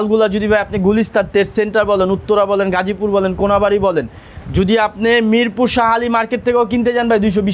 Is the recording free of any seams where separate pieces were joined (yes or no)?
yes